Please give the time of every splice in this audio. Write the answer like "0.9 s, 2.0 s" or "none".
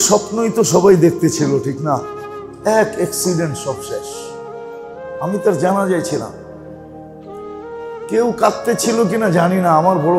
4.0 s, 5.2 s

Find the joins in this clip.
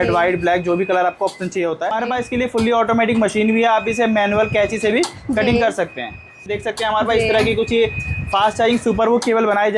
2.0 s, 6.5 s

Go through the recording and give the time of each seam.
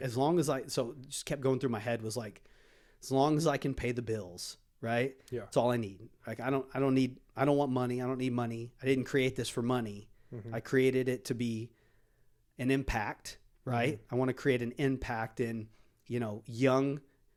none

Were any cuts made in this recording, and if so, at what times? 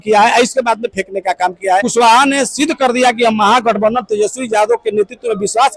1.9 s

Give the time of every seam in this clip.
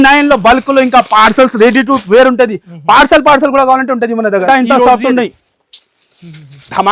4.4 s

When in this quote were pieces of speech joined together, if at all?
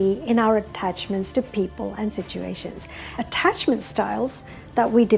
3.1 s

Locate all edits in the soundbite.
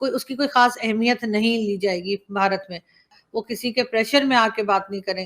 3.1 s

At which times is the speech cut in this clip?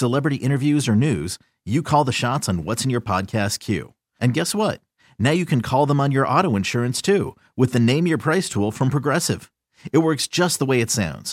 none

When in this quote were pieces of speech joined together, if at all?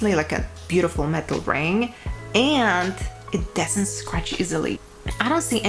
4.8 s

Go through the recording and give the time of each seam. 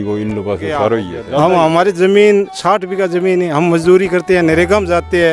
1.1 s

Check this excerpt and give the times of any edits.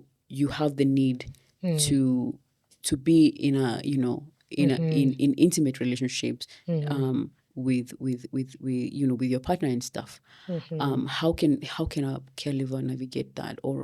none

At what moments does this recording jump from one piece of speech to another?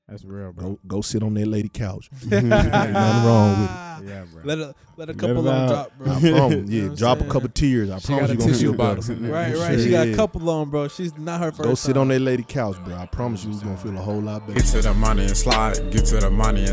14.6 s

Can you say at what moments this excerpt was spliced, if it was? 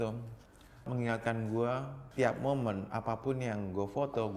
0.9 s, 2.0 s

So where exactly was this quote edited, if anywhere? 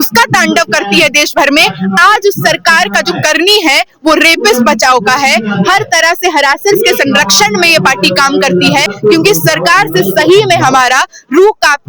8.9 s

